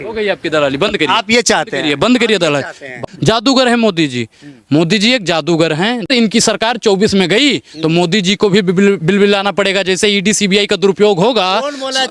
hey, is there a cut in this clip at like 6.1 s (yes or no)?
yes